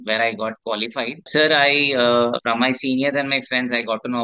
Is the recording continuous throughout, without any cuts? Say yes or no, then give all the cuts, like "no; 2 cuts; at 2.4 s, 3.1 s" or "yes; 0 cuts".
no; 2 cuts; at 1.3 s, 2.4 s